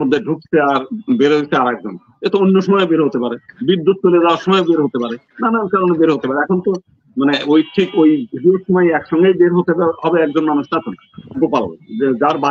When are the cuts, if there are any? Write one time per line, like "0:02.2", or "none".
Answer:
0:11.4